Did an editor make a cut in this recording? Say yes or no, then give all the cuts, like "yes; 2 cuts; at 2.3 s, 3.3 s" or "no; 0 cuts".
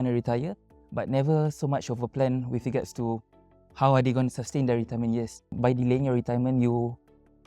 yes; 1 cut; at 5.5 s